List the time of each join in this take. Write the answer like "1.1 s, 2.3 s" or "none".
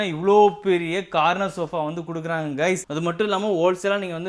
2.9 s